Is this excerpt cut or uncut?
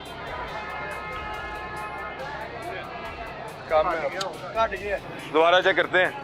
cut